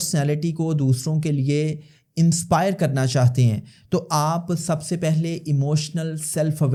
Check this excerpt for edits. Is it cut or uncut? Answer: uncut